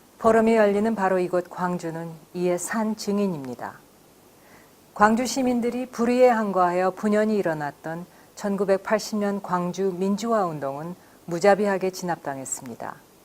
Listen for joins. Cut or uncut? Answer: cut